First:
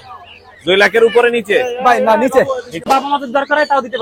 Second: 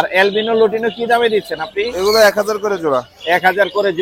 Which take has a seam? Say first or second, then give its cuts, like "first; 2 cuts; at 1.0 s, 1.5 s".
first; 1 cut; at 2.9 s